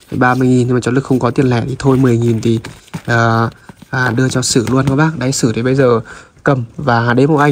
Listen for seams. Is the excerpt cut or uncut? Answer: uncut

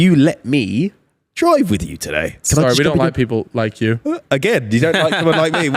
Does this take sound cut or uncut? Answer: cut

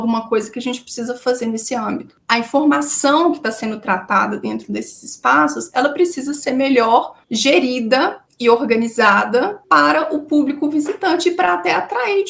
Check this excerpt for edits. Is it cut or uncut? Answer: cut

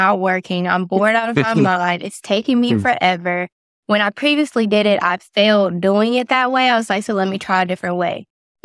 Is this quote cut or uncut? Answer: uncut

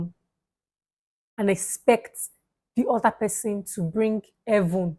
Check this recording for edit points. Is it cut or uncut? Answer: uncut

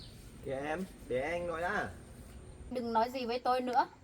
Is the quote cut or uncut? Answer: cut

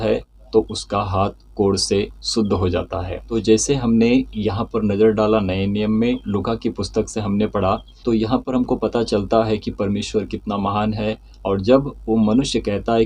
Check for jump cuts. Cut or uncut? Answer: uncut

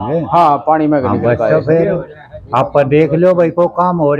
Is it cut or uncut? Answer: uncut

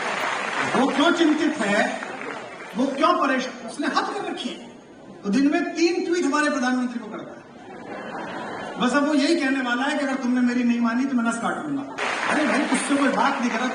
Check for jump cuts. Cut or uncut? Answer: cut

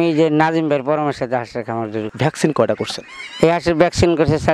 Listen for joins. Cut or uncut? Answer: cut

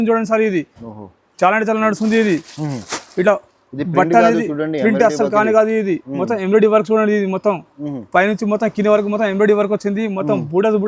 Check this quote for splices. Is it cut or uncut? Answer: uncut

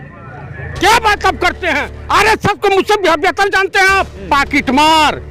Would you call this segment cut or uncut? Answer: cut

